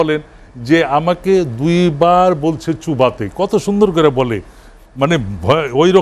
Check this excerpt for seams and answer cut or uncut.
uncut